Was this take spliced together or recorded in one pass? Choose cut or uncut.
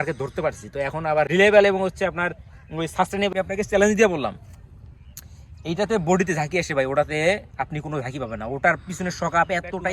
cut